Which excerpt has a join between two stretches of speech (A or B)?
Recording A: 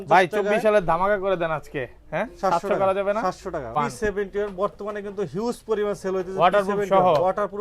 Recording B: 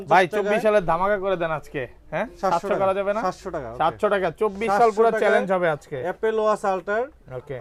A